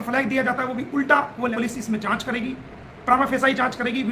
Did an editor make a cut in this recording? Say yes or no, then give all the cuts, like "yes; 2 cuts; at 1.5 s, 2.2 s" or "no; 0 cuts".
yes; 1 cut; at 1.5 s